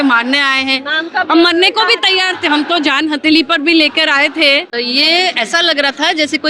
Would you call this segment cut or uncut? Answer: cut